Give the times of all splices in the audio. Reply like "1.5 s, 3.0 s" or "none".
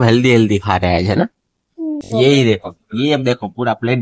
2.0 s